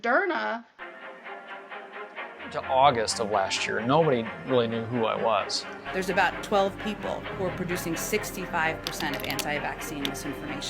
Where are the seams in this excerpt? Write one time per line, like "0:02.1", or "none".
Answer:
0:01.0